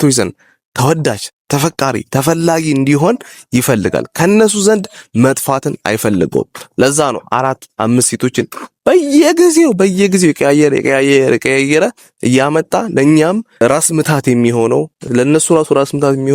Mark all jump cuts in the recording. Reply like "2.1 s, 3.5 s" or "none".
13.6 s, 15.1 s